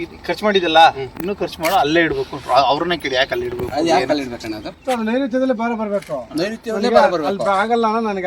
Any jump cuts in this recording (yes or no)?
no